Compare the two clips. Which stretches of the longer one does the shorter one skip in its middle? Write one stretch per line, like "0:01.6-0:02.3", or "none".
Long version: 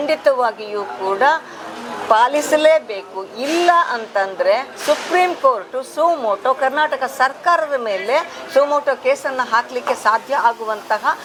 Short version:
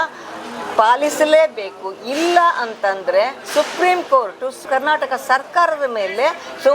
0:06.0-0:06.6